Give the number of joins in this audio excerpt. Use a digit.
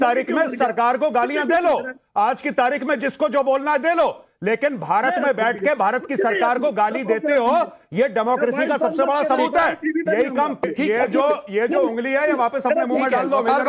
1